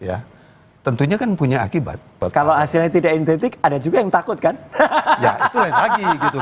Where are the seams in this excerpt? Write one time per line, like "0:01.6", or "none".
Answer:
0:02.2